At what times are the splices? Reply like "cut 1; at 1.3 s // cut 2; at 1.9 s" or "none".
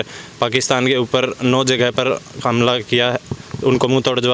none